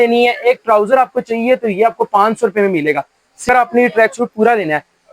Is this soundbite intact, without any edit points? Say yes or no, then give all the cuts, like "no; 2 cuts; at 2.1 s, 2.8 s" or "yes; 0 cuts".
no; 1 cut; at 3.5 s